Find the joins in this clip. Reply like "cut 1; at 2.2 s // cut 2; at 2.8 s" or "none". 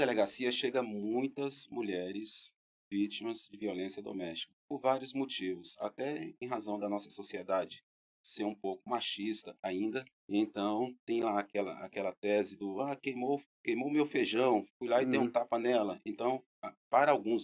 cut 1; at 4.5 s // cut 2; at 10.2 s